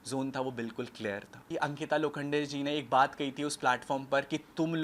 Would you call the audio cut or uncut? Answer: cut